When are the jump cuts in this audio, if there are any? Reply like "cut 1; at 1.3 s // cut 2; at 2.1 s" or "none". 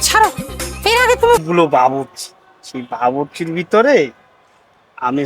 cut 1; at 1.4 s

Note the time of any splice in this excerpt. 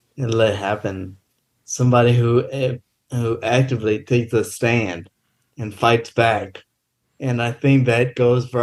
none

